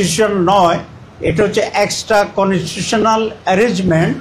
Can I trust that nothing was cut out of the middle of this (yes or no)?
yes